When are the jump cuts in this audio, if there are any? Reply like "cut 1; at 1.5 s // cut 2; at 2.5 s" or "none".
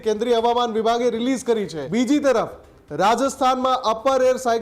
cut 1; at 1.8 s